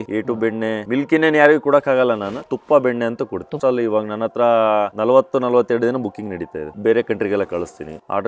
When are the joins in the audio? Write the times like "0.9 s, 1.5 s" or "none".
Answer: 2.5 s, 3.6 s, 6.7 s